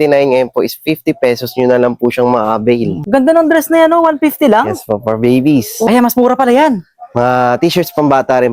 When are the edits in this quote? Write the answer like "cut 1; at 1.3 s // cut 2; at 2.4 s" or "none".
cut 1; at 3.0 s // cut 2; at 5.7 s

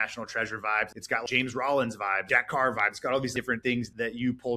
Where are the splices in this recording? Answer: cut 1; at 1.2 s // cut 2; at 2.2 s // cut 3; at 3.7 s

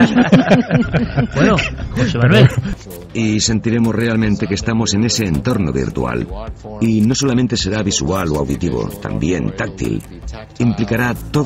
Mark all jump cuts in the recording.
cut 1; at 2.7 s

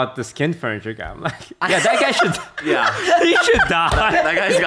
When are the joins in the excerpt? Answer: none

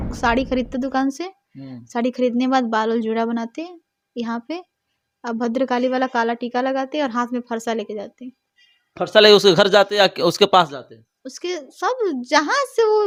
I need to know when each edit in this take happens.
none

